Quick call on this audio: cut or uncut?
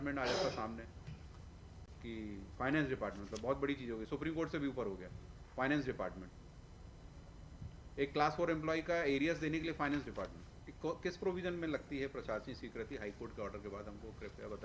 uncut